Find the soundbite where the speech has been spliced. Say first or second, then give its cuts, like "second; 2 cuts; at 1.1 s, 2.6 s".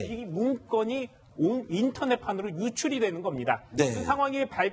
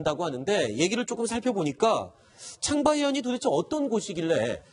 first; 1 cut; at 3.4 s